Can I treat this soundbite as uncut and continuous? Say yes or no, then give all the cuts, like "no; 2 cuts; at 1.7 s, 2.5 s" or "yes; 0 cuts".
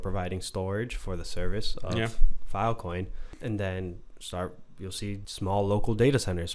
no; 2 cuts; at 3.2 s, 5.3 s